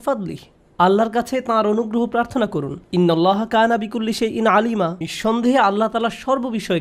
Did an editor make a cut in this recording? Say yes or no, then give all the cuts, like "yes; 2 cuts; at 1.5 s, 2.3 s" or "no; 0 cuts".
no; 0 cuts